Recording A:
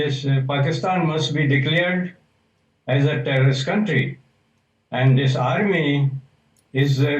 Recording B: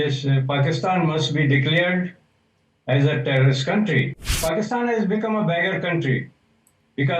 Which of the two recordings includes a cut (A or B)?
B